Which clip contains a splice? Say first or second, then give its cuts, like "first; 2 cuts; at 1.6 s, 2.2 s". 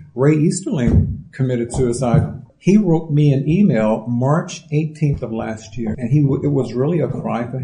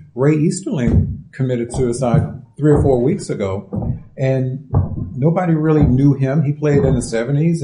first; 2 cuts; at 2.4 s, 5.9 s